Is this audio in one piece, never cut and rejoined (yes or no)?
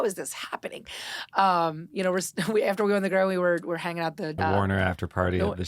no